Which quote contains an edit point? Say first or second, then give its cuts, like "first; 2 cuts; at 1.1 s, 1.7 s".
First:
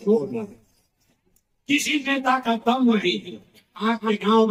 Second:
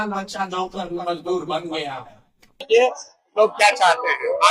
second; 1 cut; at 2.6 s